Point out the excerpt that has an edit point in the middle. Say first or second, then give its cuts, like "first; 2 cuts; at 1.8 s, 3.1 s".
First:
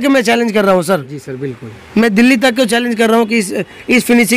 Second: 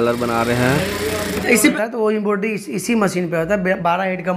second; 1 cut; at 1.7 s